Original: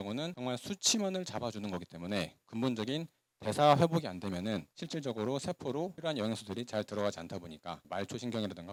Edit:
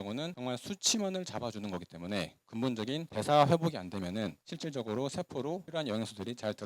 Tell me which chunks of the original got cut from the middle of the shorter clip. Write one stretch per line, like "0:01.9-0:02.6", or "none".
0:03.1-0:03.4